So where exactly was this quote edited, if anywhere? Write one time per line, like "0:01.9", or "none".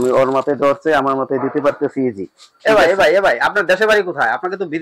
none